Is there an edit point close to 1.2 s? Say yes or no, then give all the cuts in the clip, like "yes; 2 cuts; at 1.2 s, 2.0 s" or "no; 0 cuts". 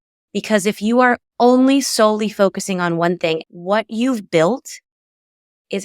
no; 1 cut; at 3.4 s